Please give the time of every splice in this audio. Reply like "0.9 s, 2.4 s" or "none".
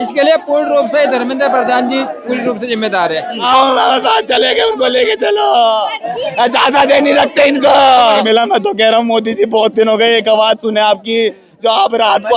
3.4 s, 8.2 s